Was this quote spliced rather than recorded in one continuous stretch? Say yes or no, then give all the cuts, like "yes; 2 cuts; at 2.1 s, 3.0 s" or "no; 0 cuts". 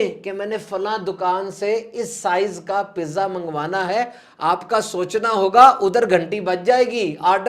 no; 0 cuts